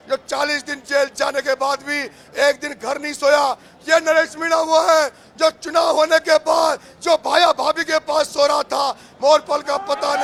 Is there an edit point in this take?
no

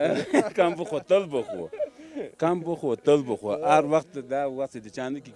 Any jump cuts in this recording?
no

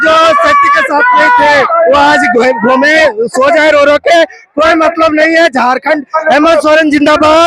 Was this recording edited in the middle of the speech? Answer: no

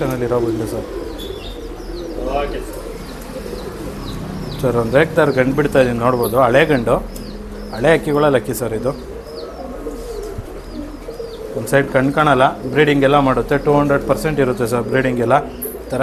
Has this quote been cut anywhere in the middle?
no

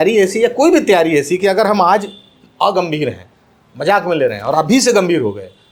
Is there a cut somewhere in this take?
no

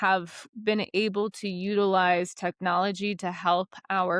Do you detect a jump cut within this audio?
no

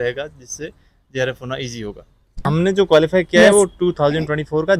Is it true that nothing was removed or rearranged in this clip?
no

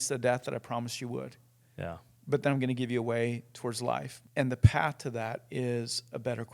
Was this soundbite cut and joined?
yes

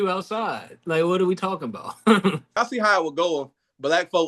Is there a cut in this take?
yes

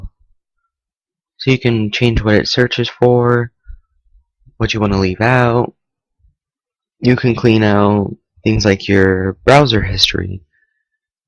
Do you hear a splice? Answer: no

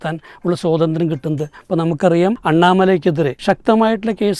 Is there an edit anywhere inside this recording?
yes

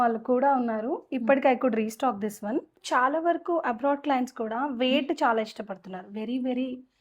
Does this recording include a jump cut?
yes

